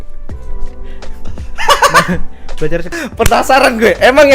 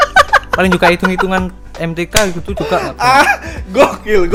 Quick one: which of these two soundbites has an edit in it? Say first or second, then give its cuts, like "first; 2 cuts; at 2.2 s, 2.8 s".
first; 1 cut; at 2.9 s